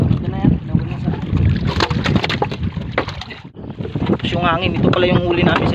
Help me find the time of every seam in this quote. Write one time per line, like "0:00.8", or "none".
0:03.7